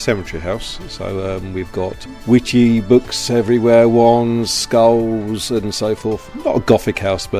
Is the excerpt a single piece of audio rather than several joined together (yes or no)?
no